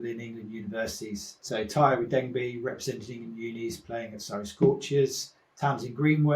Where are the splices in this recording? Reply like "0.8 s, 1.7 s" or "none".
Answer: 1.3 s